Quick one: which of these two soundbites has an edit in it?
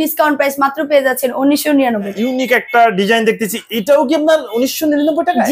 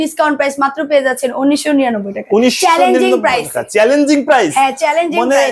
first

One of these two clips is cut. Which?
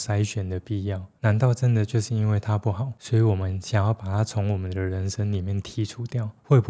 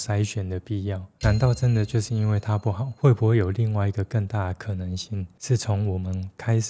second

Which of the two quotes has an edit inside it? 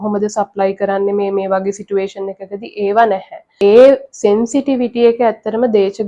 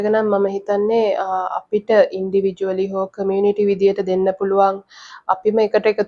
first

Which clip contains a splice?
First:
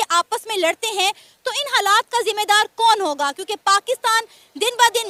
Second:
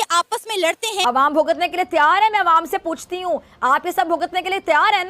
second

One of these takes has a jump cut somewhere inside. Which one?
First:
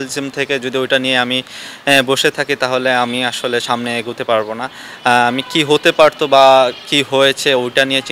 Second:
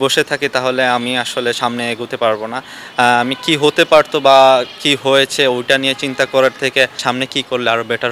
second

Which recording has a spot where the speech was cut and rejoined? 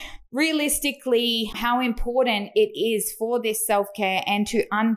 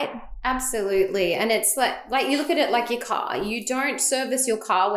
first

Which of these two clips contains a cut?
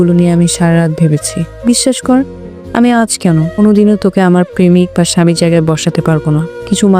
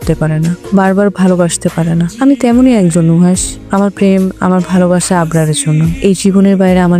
first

